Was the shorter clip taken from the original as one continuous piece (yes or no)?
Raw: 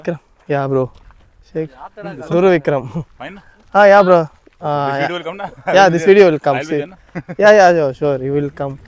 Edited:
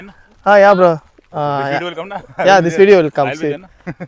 yes